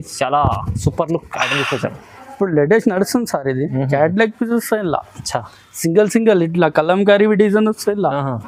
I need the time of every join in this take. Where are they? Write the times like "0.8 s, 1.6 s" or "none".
none